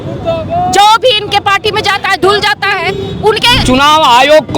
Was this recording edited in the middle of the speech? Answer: yes; 1 cut; at 3.6 s

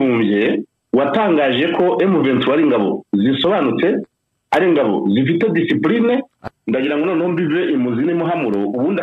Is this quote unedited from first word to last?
no; 1 cut; at 6.4 s

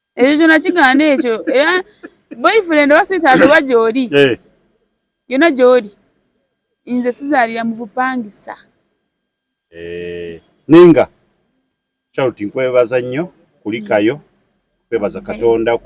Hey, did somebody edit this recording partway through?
yes; 1 cut; at 10.5 s

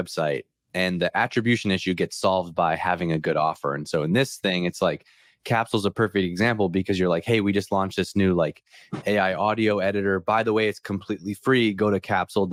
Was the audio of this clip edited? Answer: no; 0 cuts

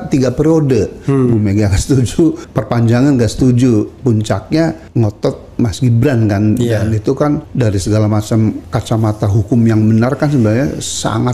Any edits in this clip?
yes; 4 cuts; at 2.4 s, 4.8 s, 7.5 s, 8.7 s

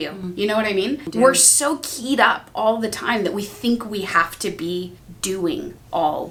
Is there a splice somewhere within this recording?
no; 0 cuts

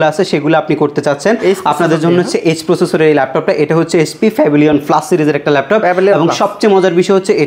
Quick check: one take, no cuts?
yes; 0 cuts

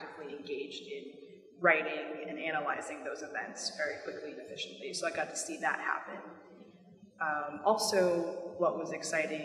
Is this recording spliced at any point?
no; 0 cuts

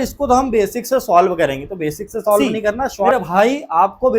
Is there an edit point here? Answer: yes; 1 cut; at 3.1 s

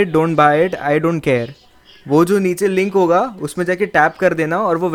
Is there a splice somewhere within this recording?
no; 0 cuts

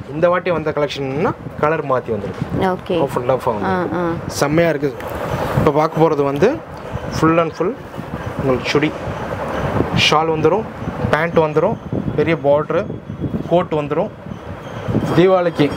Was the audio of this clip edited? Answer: yes; 2 cuts; at 5.0 s, 15.0 s

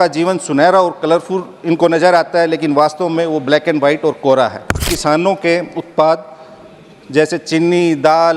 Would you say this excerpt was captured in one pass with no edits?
no; 1 cut; at 4.9 s

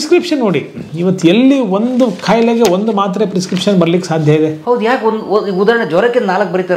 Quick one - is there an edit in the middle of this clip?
no; 0 cuts

